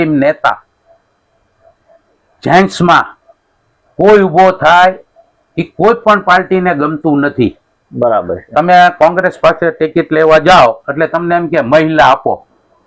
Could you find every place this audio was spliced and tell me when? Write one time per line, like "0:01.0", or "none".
none